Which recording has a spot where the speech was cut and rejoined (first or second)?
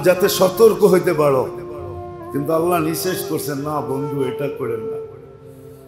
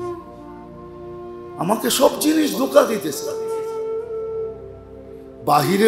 second